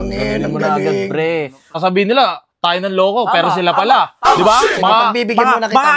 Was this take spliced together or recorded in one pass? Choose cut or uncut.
cut